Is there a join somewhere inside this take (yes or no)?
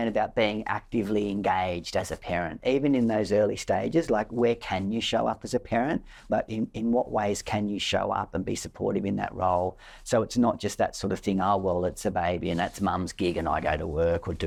no